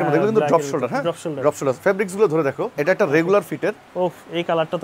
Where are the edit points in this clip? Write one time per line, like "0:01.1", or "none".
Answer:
0:02.7